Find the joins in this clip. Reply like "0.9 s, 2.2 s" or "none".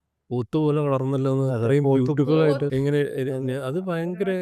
2.7 s